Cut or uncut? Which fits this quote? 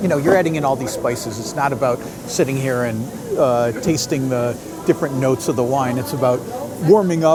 uncut